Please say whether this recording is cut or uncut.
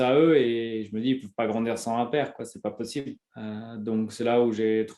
uncut